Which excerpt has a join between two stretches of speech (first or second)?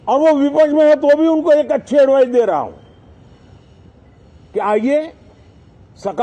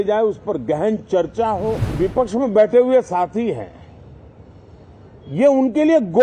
second